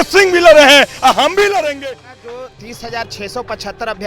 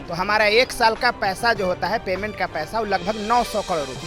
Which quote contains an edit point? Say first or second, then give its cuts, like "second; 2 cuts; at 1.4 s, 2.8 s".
first; 1 cut; at 1.8 s